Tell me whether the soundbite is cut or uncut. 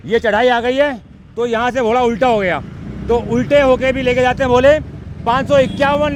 uncut